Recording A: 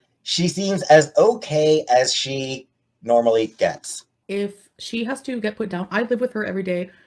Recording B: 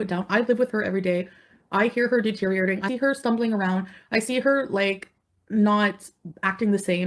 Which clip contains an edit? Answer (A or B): B